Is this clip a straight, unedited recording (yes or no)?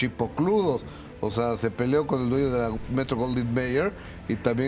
yes